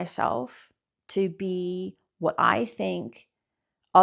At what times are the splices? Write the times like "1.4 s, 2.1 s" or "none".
none